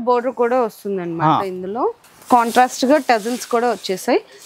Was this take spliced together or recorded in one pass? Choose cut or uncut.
cut